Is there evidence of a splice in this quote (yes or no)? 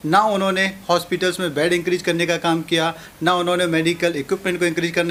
no